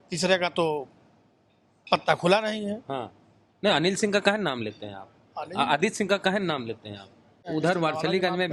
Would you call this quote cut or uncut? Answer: cut